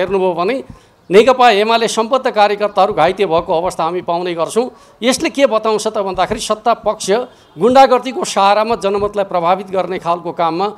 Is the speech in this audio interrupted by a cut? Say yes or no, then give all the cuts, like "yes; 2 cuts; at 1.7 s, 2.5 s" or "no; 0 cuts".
no; 0 cuts